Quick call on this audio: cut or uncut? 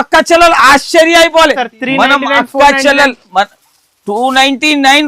cut